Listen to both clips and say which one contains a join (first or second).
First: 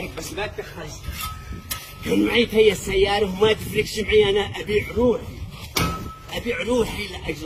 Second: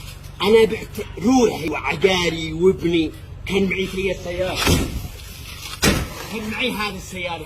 second